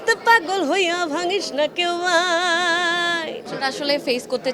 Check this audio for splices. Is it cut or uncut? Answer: cut